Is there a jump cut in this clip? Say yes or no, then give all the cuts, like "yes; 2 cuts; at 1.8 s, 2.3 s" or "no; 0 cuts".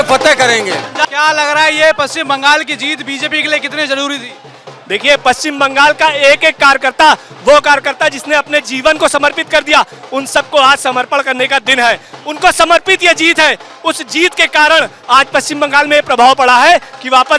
yes; 1 cut; at 1.0 s